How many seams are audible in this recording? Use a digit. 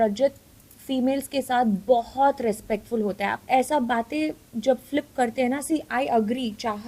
1